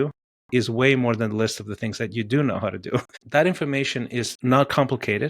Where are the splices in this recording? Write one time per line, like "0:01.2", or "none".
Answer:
0:03.2
0:04.3